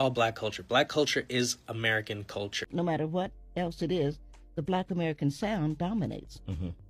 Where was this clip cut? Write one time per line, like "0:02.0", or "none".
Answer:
0:02.7